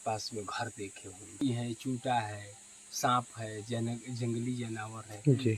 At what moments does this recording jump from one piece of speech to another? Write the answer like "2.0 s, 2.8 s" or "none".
1.4 s